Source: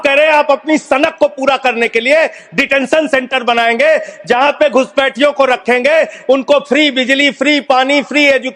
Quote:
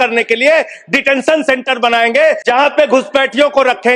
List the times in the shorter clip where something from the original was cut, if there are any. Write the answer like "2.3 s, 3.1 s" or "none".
2.4 s